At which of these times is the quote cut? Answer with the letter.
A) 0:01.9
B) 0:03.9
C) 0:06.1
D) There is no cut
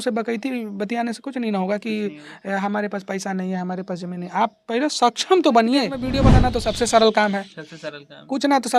C